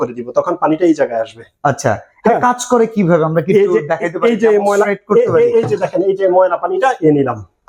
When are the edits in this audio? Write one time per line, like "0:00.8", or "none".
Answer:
none